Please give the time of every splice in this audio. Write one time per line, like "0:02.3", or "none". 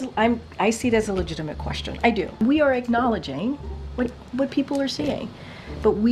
0:02.4

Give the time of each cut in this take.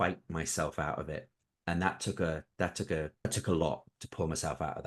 0:01.4
0:03.2

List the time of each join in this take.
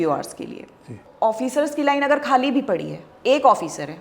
0:01.0

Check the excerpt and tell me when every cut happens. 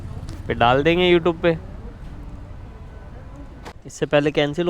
0:03.7

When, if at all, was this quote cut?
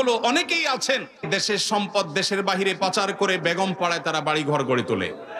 0:01.2

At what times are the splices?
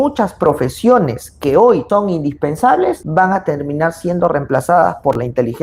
none

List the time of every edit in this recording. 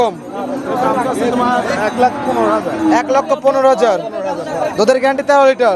none

